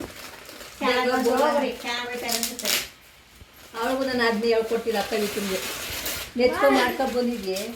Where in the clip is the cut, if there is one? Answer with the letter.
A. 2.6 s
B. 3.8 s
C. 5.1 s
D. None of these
D